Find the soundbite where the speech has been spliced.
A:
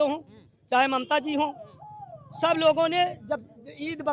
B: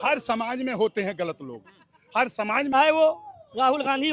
B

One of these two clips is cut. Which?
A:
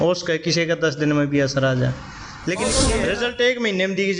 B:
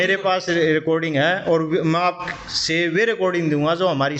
A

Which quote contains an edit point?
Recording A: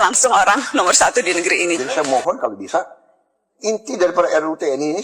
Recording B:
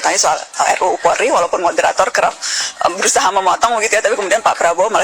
A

